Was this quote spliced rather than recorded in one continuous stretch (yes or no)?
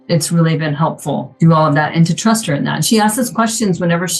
no